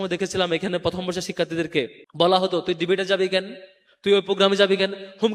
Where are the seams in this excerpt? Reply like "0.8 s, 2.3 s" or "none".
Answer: 2.0 s